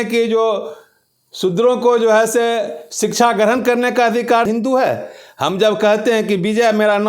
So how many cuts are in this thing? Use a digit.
1